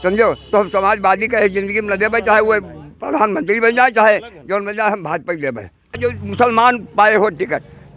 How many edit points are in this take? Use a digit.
1